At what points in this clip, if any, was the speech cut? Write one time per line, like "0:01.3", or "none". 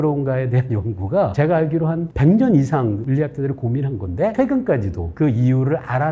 0:01.3
0:03.0
0:04.3

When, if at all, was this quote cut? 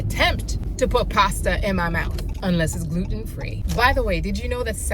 none

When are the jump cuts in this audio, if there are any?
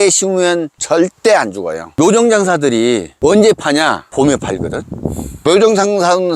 0:01.9

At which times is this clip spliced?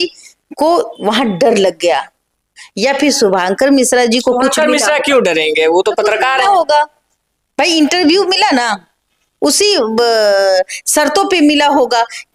none

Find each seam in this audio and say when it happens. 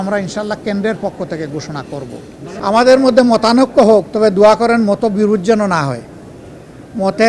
0:02.5

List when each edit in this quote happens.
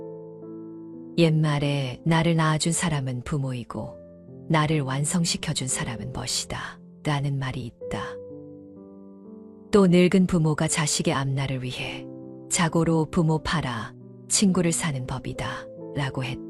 0:07.9
0:09.7

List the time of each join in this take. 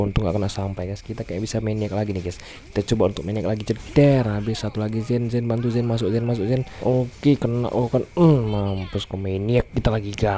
0:06.7

